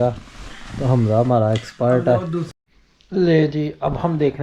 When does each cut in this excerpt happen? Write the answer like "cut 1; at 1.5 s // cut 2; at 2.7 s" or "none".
cut 1; at 2.5 s

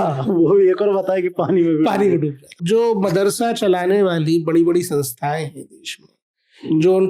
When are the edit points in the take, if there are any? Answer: cut 1; at 2.6 s

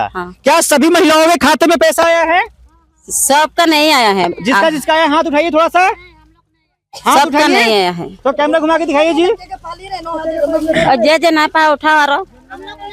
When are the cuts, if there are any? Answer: none

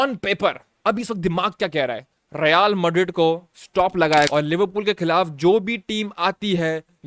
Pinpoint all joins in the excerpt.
cut 1; at 4.3 s

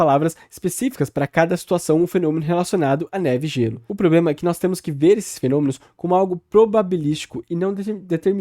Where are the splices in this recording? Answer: none

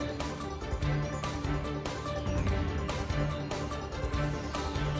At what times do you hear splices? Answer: none

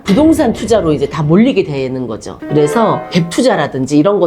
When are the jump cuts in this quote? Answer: cut 1; at 2.4 s

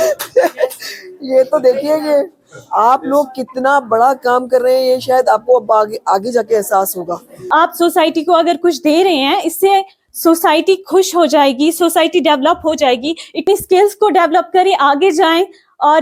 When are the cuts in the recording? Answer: cut 1; at 7.7 s // cut 2; at 13.4 s

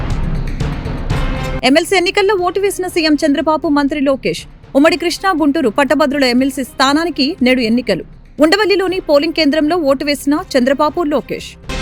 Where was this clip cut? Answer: none

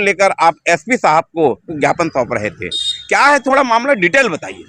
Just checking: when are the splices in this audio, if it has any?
cut 1; at 1.6 s

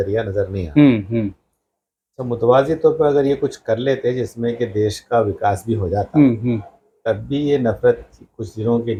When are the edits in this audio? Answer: none

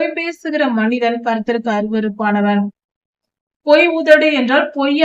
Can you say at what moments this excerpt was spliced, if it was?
cut 1; at 2.9 s

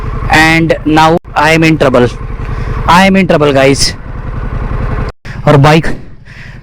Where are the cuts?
cut 1; at 5.2 s

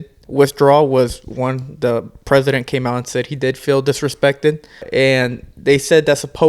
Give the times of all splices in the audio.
cut 1; at 4.9 s

